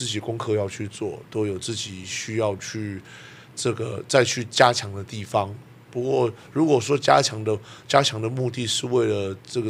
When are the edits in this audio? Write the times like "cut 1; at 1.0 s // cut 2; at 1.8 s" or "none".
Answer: none